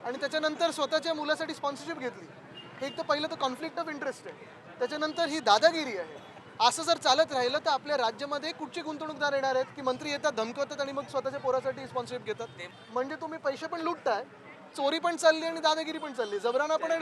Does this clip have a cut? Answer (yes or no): yes